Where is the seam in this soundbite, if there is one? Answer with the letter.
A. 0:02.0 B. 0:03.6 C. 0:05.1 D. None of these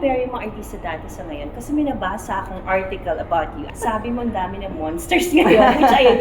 B